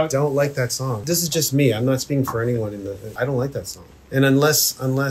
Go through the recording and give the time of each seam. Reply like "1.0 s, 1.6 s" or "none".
3.0 s